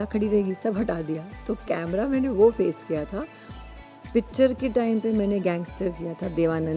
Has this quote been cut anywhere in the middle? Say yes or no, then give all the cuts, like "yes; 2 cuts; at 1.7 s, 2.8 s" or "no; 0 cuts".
no; 0 cuts